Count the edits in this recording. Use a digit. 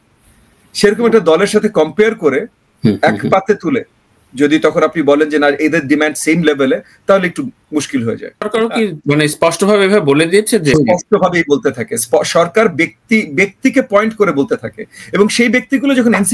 1